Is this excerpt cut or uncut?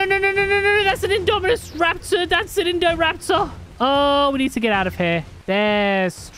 cut